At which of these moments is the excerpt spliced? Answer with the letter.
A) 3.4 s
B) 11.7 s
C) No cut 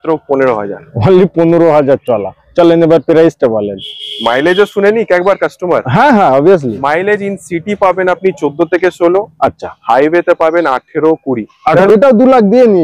B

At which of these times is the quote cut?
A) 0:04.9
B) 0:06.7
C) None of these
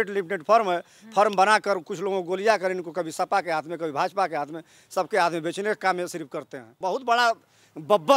B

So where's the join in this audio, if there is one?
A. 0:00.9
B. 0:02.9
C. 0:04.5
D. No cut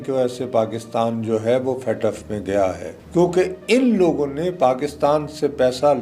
B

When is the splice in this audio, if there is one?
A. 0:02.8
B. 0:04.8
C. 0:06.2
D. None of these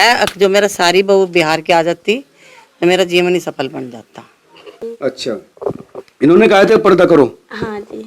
B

